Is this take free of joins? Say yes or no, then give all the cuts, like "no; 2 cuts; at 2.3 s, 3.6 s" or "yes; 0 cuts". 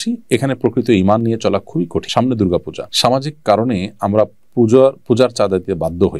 no; 2 cuts; at 2.0 s, 2.8 s